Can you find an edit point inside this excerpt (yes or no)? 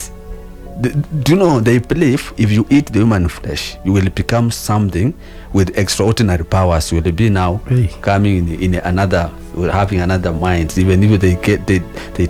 no